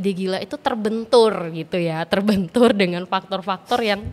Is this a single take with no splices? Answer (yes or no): yes